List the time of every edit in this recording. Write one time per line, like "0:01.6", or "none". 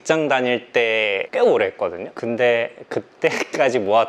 0:01.2
0:02.1